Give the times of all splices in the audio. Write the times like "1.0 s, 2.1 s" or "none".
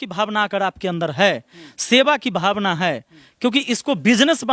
none